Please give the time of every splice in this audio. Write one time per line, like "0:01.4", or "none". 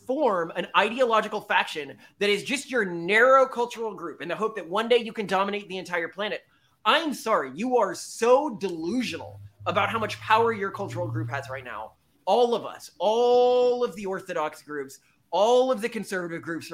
none